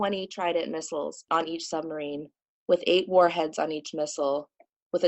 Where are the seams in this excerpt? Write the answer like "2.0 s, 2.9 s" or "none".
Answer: 1.2 s